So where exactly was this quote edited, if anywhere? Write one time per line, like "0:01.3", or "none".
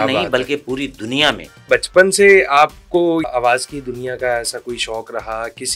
0:01.7
0:03.3